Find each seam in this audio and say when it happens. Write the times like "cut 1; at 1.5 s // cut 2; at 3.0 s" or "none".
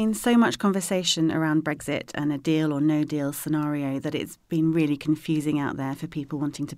none